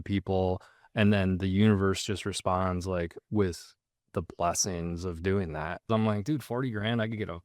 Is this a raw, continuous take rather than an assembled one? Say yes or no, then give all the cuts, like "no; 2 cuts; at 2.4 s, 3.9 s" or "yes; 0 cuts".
no; 1 cut; at 5.8 s